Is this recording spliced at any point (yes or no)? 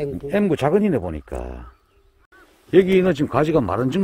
yes